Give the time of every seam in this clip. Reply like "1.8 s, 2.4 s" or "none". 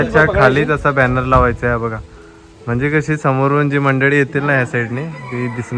none